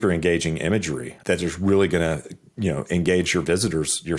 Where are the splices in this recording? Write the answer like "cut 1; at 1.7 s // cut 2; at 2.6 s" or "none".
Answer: cut 1; at 1.1 s